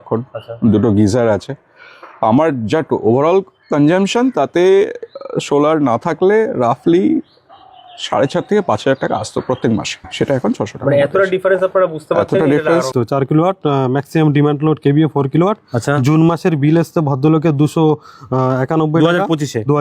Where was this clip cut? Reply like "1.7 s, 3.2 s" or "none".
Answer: 10.1 s, 12.9 s